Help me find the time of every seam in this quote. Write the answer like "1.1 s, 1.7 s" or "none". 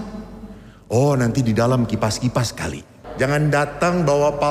3.1 s